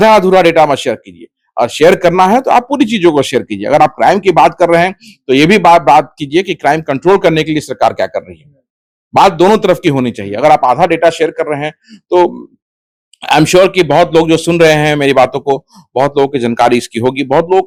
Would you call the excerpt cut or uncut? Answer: uncut